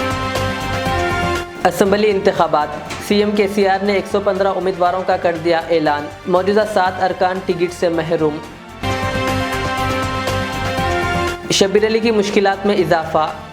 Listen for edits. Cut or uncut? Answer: uncut